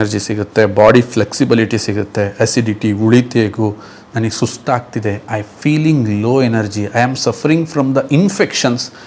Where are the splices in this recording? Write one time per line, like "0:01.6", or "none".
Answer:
none